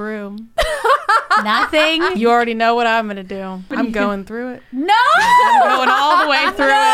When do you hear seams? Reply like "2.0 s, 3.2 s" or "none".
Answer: 2.1 s, 3.7 s

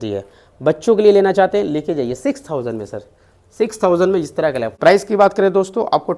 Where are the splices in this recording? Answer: 4.7 s

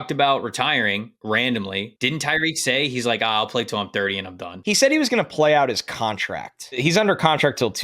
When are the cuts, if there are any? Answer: 1.1 s, 2.2 s, 4.5 s, 6.8 s

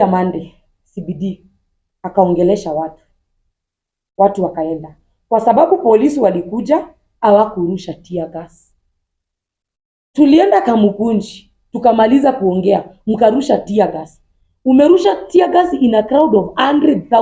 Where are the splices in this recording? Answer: none

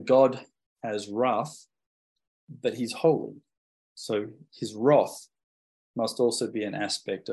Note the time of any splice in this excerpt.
none

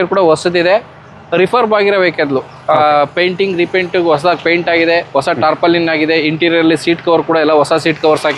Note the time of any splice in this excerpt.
none

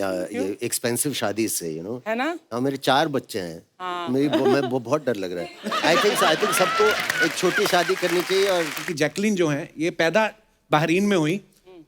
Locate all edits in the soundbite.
8.9 s

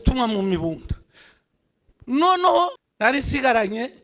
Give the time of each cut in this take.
3.1 s

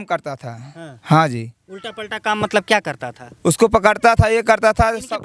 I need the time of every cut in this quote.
none

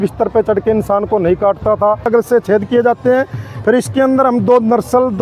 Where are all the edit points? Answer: 2.1 s

